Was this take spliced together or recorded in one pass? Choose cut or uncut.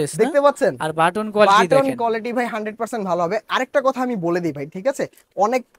uncut